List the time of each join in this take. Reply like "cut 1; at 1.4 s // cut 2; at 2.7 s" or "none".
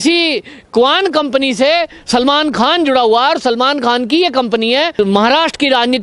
cut 1; at 4.9 s